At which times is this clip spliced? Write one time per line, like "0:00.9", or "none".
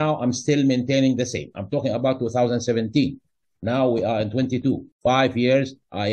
0:04.9